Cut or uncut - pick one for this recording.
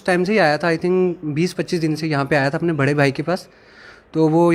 uncut